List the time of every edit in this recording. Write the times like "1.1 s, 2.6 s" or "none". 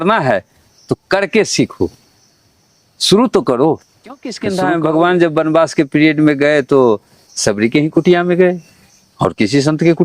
4.4 s